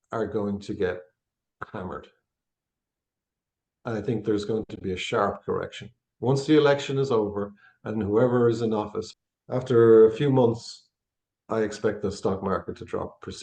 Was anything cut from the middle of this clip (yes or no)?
yes